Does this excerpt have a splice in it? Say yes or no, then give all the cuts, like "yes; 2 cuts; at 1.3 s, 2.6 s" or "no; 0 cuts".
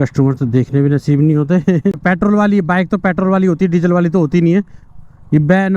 yes; 1 cut; at 2.0 s